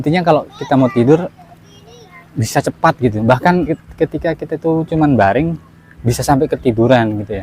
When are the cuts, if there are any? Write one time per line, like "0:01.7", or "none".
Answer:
0:03.8